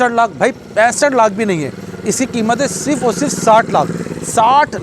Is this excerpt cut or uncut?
uncut